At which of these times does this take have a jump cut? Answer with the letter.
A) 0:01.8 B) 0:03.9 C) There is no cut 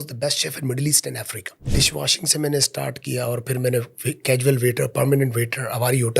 A